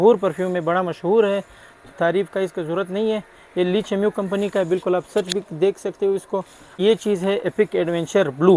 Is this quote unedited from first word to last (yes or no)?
no